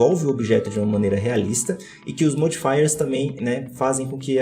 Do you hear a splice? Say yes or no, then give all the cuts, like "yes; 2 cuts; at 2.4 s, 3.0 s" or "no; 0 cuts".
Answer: no; 0 cuts